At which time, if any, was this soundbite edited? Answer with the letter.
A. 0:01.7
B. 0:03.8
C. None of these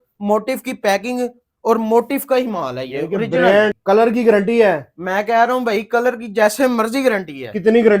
B